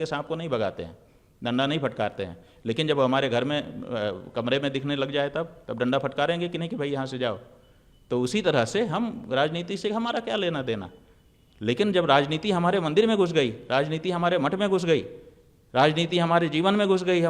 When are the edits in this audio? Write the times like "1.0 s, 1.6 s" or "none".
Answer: none